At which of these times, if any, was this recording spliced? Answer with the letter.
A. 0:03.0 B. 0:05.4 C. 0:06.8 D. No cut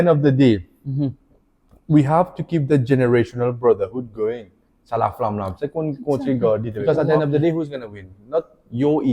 C